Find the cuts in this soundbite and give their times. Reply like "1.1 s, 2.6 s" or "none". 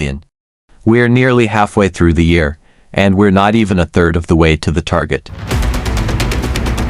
5.3 s